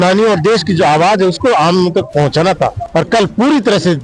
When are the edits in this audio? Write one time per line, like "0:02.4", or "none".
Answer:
0:02.8